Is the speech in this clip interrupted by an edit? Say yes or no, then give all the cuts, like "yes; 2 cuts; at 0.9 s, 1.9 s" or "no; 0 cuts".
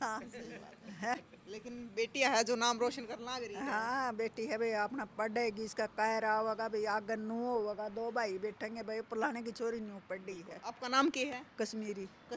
no; 0 cuts